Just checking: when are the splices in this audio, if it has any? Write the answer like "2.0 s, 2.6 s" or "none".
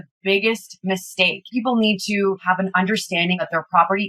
1.5 s, 2.4 s, 3.4 s